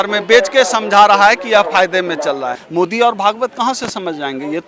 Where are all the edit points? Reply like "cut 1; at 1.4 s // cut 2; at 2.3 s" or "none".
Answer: cut 1; at 2.6 s